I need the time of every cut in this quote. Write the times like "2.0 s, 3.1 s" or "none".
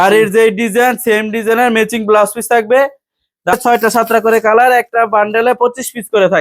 3.5 s

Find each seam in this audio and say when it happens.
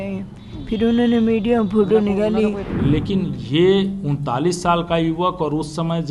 2.7 s

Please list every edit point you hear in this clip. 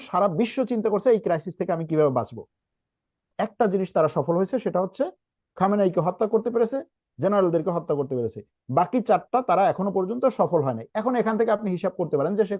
3.3 s

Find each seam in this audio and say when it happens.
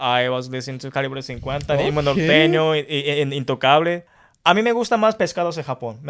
4.1 s

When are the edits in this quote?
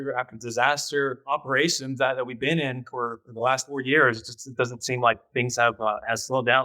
1.2 s

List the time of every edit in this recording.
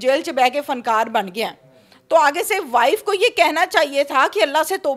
none

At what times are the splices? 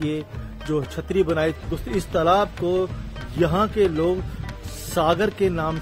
1.6 s

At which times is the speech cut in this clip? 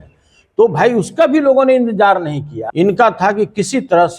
2.5 s

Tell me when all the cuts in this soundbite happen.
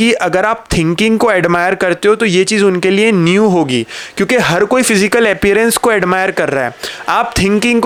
none

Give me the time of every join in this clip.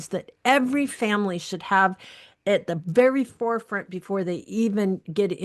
none

